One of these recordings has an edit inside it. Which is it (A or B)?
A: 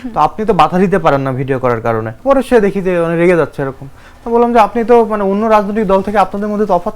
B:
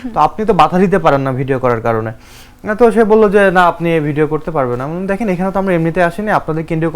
A